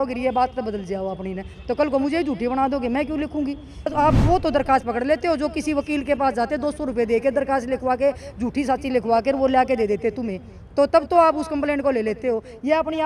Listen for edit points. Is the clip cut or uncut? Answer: cut